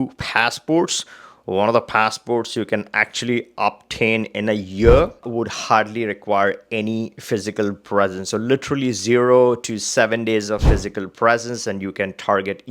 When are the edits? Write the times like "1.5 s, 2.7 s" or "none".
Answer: 5.3 s